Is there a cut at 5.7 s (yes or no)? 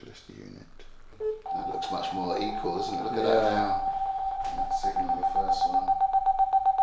no